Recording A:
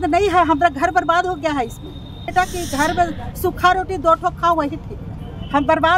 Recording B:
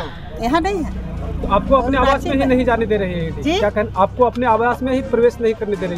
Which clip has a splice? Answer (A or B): A